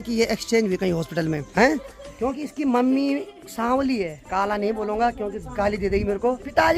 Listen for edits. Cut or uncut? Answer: uncut